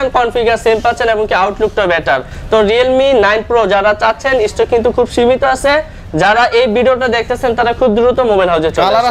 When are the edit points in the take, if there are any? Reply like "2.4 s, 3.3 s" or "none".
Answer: none